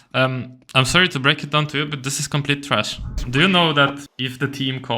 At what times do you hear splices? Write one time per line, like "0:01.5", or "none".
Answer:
0:03.2
0:04.1